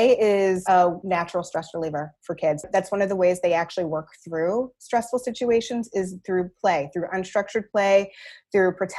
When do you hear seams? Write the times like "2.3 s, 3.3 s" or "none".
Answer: 0.8 s, 2.6 s

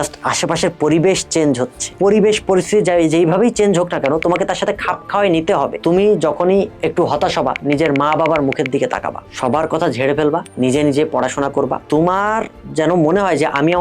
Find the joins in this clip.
1.8 s, 5.7 s, 6.7 s, 9.3 s, 10.5 s

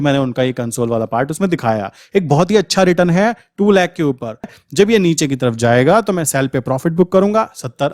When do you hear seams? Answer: 4.5 s

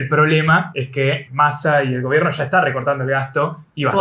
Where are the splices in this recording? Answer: 1.1 s

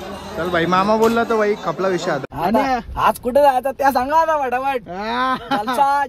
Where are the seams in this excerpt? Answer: 2.3 s

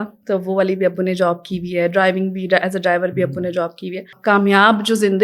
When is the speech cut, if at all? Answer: 4.1 s

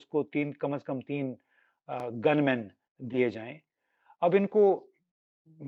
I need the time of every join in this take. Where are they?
none

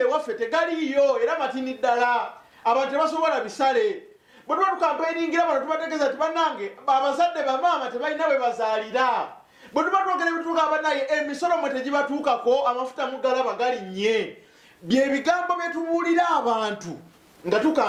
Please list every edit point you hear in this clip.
none

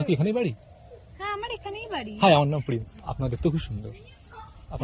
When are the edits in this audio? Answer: 3.0 s

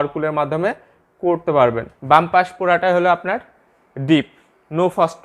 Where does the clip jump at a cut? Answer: 1.9 s

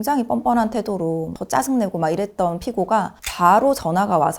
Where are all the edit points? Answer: 1.3 s

